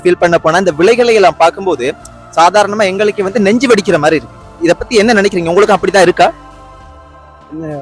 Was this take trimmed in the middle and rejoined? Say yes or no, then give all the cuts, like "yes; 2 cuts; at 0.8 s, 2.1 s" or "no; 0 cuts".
no; 0 cuts